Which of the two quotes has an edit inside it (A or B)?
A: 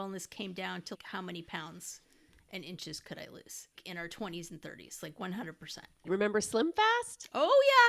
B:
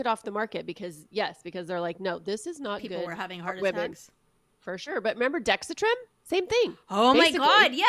A